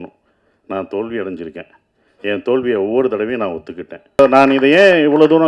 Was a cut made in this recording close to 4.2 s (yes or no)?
yes